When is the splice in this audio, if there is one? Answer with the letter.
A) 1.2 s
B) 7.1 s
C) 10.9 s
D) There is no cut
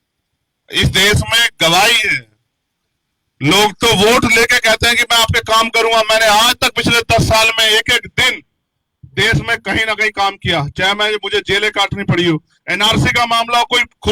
D